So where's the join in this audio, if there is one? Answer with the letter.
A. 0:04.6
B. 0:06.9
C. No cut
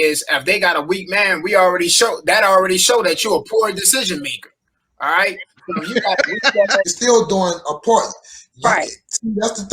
B